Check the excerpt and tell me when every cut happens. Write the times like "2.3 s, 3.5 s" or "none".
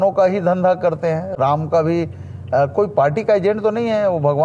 none